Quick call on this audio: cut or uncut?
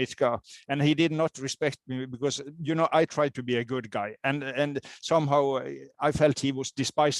uncut